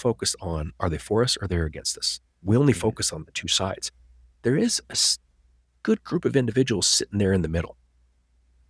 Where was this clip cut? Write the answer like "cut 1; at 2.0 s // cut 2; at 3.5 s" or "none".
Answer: none